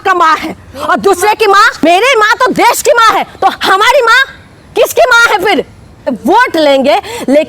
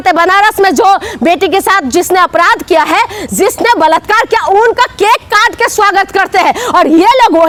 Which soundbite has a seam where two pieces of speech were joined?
first; 2 cuts; at 1.8 s, 6.2 s

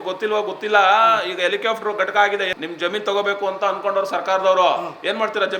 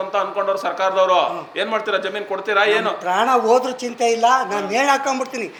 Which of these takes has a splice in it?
first; 1 cut; at 2.5 s

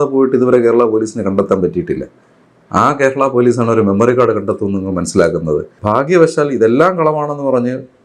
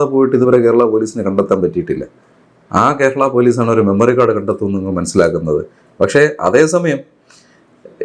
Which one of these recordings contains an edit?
first; 1 cut; at 5.7 s

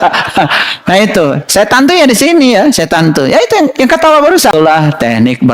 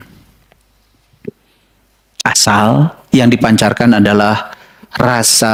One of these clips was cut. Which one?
first; 1 cut; at 4.5 s

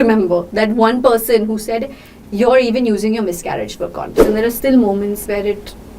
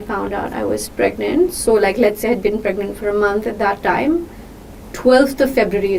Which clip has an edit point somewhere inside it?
first; 1 cut; at 4.2 s

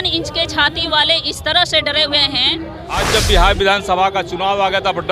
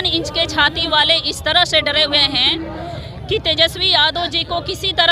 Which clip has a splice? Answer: first; 1 cut; at 3.0 s

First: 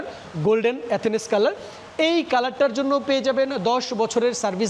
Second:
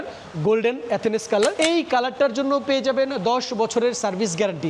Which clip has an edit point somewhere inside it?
second; 1 cut; at 1.6 s

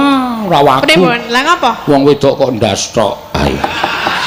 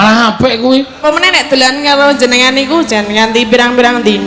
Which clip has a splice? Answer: second; 1 cut; at 1.0 s

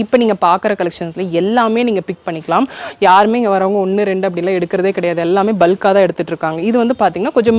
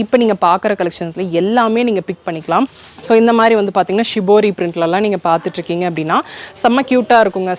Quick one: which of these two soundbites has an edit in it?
second; 1 cut; at 2.8 s

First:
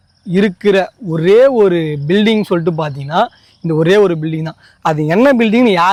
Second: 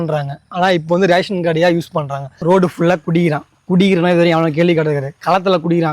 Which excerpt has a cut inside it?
second; 1 cut; at 2.3 s

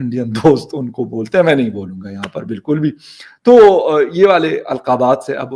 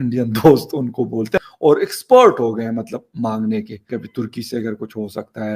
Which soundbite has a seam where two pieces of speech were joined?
second; 2 cuts; at 1.4 s, 3.8 s

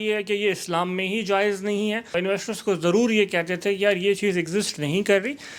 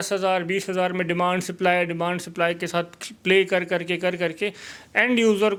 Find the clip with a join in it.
first; 1 cut; at 2.1 s

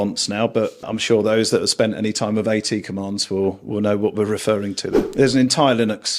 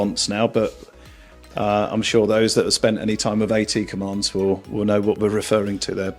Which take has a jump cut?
first; 2 cuts; at 0.9 s, 4.9 s

